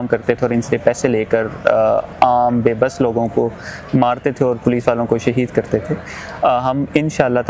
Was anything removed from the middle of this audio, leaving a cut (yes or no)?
no